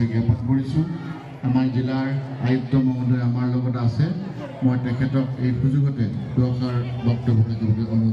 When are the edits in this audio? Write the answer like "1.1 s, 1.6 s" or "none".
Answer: none